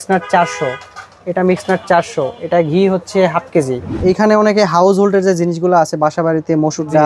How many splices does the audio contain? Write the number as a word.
one